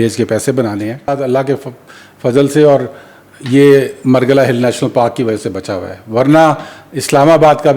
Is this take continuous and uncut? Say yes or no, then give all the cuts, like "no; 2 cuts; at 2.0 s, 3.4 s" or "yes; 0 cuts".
no; 1 cut; at 1.1 s